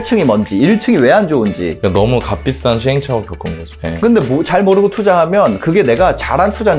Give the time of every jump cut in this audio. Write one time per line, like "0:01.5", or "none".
0:03.7